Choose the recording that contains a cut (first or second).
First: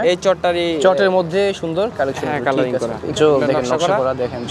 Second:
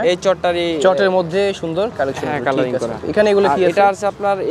first